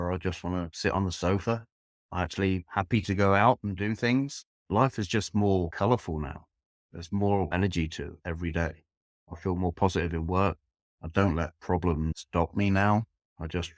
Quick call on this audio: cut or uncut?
cut